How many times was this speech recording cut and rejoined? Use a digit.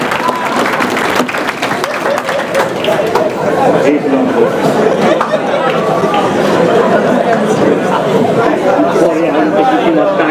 0